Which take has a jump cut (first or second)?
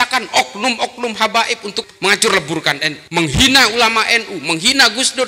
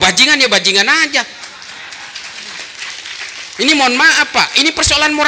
first